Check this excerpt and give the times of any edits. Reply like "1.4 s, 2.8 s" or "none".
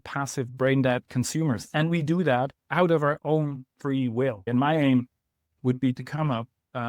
1.1 s, 4.5 s